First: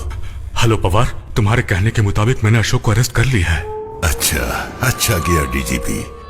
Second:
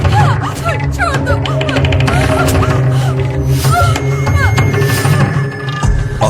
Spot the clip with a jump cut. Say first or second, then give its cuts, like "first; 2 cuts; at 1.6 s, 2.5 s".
first; 1 cut; at 1.2 s